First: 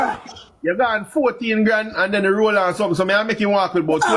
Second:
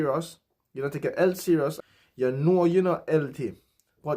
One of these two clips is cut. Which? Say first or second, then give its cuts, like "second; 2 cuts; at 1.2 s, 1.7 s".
second; 1 cut; at 1.8 s